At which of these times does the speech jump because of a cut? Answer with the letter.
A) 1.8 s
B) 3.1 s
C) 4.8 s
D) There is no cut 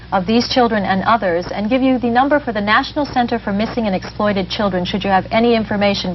D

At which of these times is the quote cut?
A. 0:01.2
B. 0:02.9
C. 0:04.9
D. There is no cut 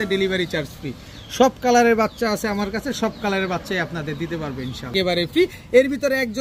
C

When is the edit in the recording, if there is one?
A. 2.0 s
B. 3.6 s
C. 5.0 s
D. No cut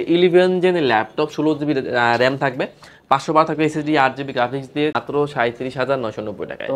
C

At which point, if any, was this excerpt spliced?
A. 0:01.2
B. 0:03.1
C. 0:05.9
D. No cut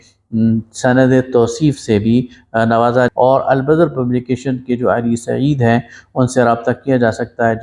B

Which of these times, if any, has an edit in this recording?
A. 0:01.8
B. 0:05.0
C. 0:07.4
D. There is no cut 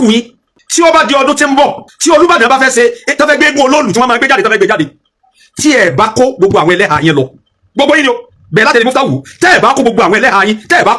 D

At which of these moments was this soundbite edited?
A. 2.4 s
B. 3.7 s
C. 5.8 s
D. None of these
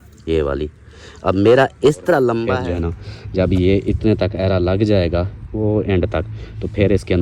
A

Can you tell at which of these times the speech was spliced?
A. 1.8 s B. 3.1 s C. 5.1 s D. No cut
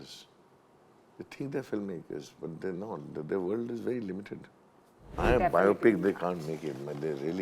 C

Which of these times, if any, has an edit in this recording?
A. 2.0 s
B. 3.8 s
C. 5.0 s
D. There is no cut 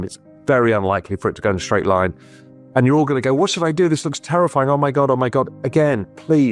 D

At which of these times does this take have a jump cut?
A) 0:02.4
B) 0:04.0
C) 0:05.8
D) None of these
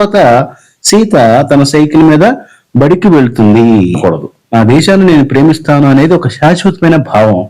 B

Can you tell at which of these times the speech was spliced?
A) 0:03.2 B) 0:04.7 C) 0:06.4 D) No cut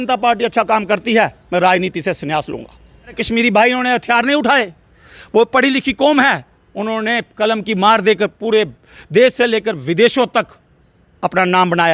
A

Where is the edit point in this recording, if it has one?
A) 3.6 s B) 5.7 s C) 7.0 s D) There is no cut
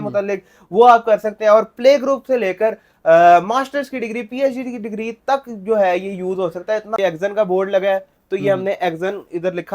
C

